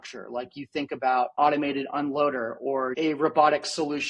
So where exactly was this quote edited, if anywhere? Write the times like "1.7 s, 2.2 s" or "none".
1.3 s, 2.9 s